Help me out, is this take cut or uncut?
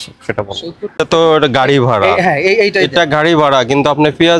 cut